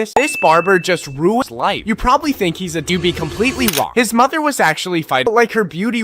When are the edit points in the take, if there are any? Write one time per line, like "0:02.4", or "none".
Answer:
0:01.4
0:02.9
0:05.3